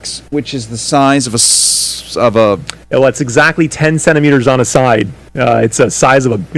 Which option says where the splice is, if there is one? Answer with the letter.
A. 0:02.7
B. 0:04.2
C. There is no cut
C